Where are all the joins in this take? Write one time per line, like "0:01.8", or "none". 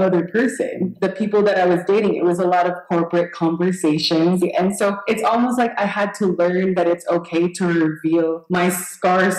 none